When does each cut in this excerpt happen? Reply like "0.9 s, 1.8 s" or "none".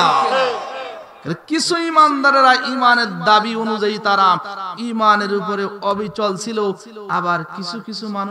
none